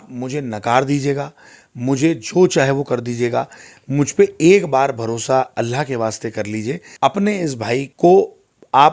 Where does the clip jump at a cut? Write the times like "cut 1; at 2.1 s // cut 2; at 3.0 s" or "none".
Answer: cut 1; at 6.8 s // cut 2; at 7.9 s